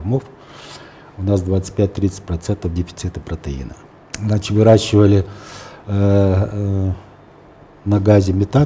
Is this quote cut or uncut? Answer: cut